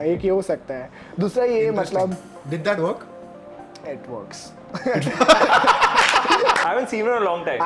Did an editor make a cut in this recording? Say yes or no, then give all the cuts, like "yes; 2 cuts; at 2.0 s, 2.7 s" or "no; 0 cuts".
yes; 1 cut; at 6.6 s